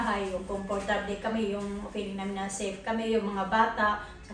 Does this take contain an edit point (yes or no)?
no